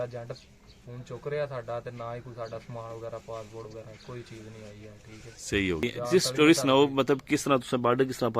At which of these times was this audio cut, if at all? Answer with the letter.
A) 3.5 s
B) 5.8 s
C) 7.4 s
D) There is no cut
B